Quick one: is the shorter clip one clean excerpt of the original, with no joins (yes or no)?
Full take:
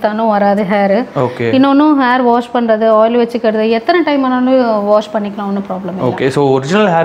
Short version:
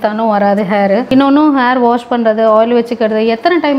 no